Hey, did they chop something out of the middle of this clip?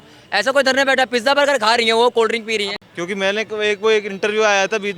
yes; 1 cut; at 2.8 s

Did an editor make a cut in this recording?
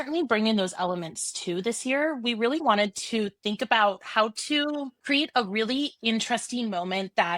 yes; 1 cut; at 2.6 s

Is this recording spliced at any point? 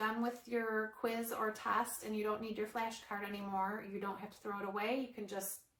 no; 0 cuts

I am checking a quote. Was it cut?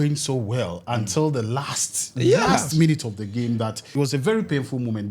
yes; 1 cut; at 3.8 s

